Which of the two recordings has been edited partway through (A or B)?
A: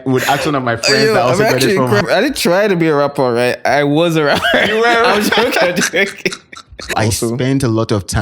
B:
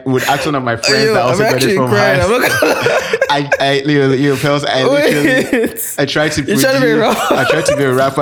A